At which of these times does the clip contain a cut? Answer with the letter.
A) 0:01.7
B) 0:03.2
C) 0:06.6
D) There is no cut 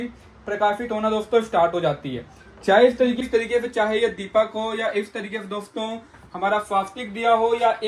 B